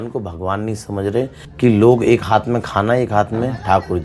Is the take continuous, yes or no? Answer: no